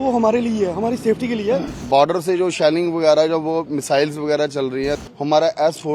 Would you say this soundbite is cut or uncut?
cut